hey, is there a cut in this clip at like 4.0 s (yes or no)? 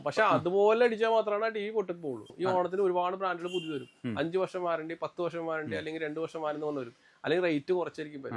no